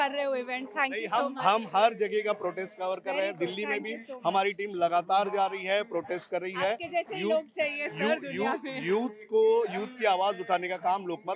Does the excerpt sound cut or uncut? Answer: uncut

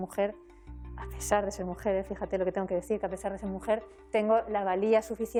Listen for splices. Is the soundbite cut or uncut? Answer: uncut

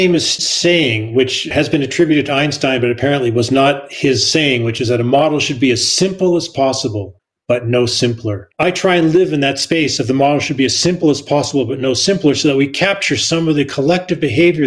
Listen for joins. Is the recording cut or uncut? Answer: cut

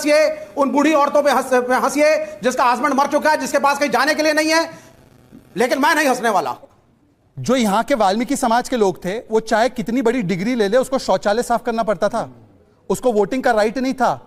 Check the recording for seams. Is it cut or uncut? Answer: cut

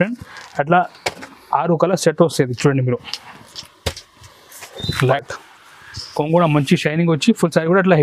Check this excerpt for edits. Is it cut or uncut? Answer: cut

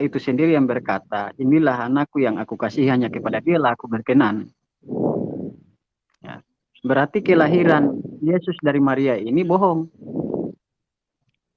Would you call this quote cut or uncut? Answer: uncut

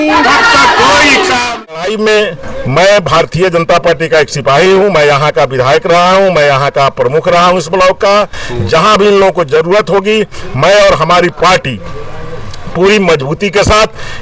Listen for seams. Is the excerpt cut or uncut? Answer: cut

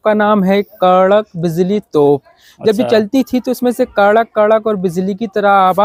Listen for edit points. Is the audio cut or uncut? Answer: uncut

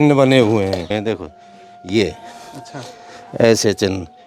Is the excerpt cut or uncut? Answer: cut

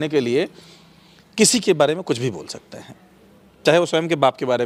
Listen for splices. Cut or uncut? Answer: uncut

